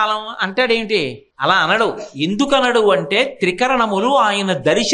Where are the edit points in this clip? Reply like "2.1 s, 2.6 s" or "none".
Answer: 1.2 s